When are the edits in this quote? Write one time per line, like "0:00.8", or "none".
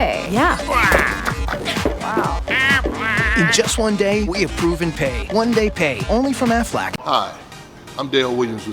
0:07.0